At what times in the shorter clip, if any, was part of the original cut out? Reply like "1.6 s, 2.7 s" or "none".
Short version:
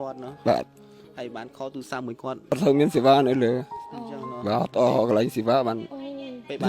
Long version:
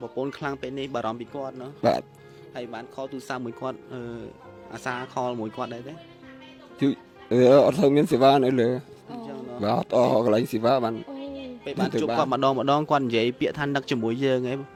2.6 s